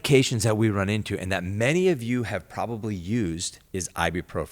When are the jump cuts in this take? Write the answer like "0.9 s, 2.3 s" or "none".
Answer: 3.5 s